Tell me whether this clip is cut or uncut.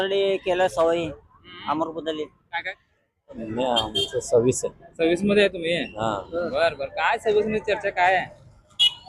cut